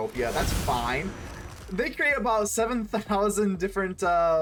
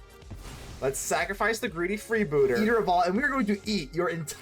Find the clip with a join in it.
second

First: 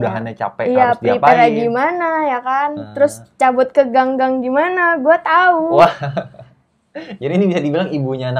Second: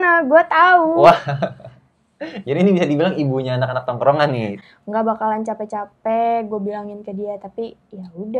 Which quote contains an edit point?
second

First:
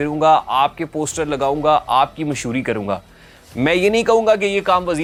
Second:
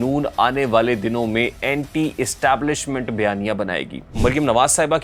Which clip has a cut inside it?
second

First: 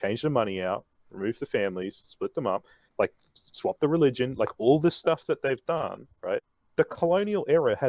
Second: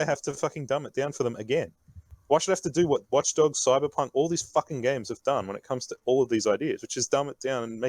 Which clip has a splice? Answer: first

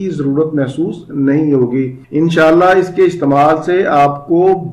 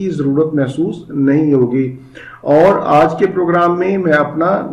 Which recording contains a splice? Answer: first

